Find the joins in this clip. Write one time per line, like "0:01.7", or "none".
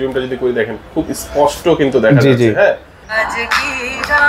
0:03.0